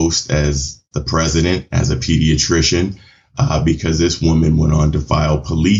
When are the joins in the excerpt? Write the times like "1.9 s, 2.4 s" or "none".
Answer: none